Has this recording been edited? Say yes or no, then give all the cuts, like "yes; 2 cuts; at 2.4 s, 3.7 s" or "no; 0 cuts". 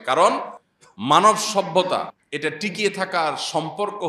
yes; 2 cuts; at 1.2 s, 2.6 s